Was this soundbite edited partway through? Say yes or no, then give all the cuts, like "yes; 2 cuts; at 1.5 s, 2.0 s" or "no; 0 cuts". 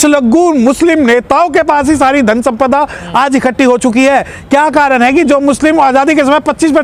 no; 0 cuts